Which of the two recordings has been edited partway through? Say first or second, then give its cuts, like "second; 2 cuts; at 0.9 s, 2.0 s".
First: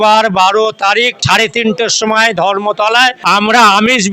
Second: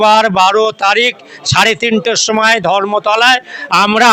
first; 2 cuts; at 1.2 s, 3.2 s